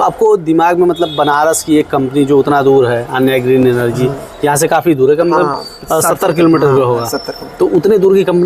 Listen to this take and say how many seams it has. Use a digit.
0